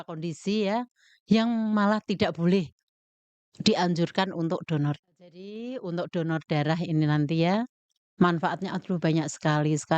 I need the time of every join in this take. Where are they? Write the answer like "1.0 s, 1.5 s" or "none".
5.1 s